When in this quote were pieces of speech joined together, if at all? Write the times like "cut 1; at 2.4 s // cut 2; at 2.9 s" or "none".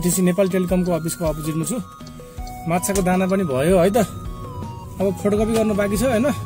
none